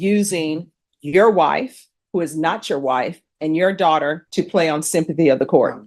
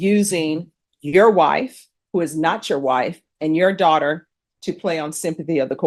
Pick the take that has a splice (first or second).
first